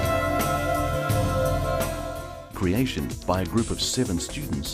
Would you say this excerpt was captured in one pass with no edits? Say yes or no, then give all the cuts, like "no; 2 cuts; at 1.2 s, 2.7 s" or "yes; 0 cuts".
yes; 0 cuts